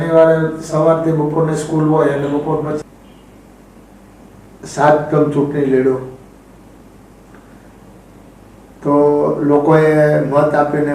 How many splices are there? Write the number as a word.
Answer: one